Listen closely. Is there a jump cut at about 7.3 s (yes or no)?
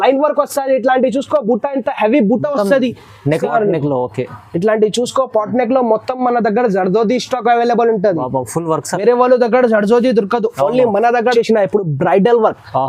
no